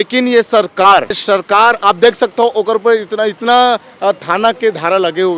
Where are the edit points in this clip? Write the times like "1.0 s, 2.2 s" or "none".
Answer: 1.2 s